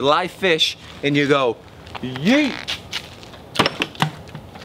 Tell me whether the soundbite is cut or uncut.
uncut